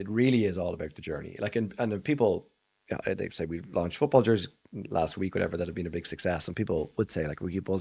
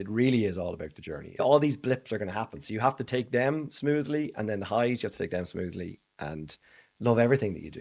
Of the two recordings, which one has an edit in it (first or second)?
second